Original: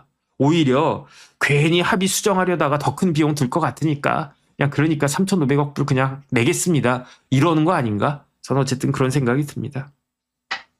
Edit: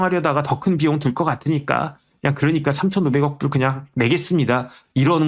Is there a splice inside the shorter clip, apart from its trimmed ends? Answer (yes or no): no